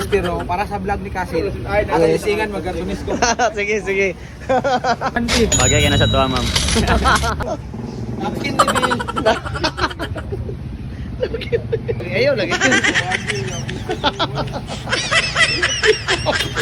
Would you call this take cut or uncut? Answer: uncut